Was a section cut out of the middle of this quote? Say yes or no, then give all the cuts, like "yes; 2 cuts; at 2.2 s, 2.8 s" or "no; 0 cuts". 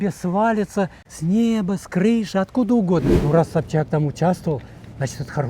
yes; 2 cuts; at 1.1 s, 3.1 s